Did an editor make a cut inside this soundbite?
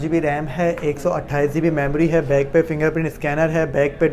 no; 0 cuts

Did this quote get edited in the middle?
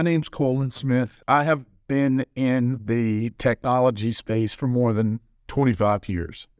yes; 1 cut; at 1.2 s

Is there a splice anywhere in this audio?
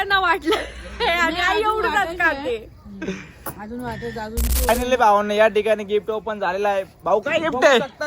yes; 1 cut; at 4.7 s

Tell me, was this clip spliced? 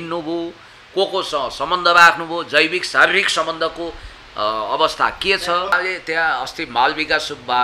yes; 1 cut; at 5.8 s

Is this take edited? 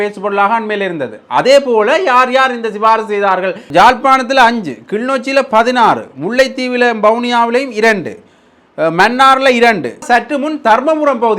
yes; 2 cuts; at 3.6 s, 10.0 s

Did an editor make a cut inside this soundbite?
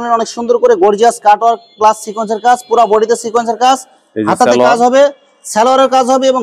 no; 0 cuts

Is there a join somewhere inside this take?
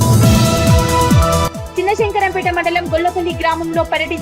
yes; 1 cut; at 1.4 s

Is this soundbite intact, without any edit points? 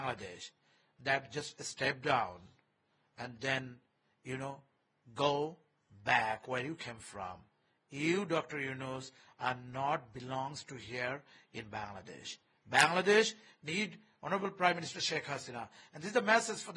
yes; 0 cuts

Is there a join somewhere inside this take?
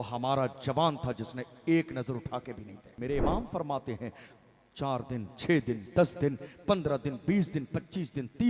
yes; 1 cut; at 3.0 s

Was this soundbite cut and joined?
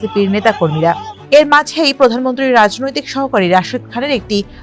yes; 1 cut; at 1.1 s

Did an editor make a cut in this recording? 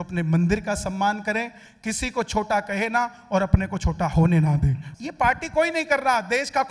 yes; 1 cut; at 4.8 s

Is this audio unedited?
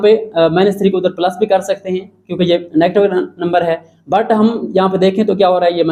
yes; 0 cuts

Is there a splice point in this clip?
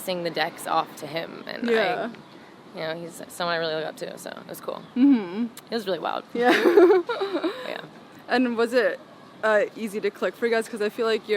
no; 0 cuts

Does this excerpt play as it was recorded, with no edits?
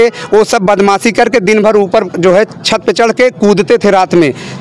yes; 0 cuts

